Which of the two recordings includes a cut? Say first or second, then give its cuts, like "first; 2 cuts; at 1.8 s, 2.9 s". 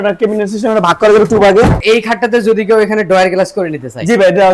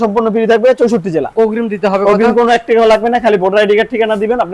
first; 1 cut; at 1.8 s